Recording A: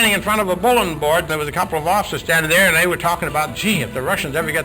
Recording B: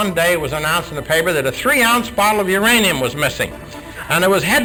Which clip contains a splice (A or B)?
A